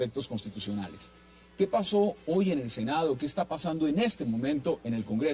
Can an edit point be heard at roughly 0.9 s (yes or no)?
no